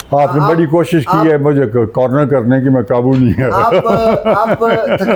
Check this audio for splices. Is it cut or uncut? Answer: uncut